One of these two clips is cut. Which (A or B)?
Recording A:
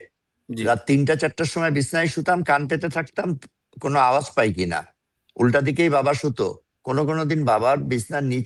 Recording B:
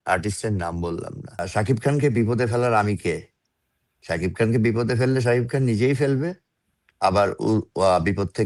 B